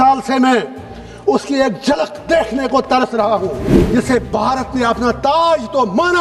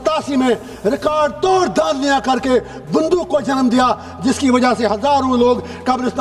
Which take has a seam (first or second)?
first